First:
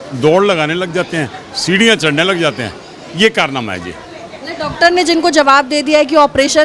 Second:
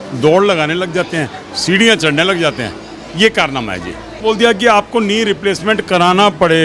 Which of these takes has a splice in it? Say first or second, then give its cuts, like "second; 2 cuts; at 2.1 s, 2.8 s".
second; 1 cut; at 4.1 s